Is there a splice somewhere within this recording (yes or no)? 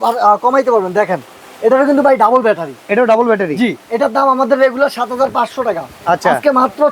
no